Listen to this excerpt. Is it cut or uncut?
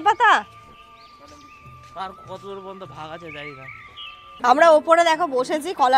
cut